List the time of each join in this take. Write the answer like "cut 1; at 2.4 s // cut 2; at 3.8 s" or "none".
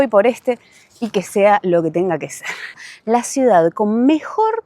cut 1; at 2.8 s